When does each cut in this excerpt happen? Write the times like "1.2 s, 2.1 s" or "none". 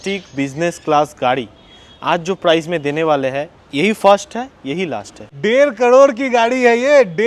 5.3 s

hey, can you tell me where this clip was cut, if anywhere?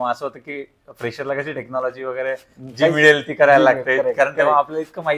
none

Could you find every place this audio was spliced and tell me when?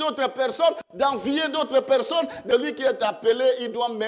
2.4 s

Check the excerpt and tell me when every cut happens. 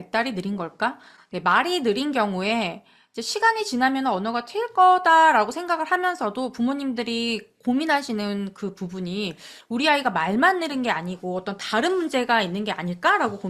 none

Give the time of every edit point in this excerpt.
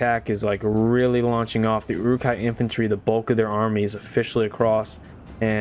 none

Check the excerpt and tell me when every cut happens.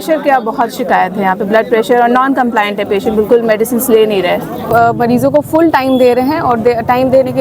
4.7 s

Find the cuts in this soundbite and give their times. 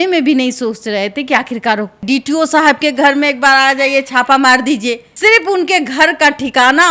2.0 s, 5.1 s

